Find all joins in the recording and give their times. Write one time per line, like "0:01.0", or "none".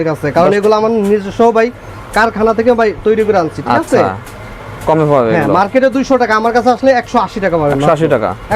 none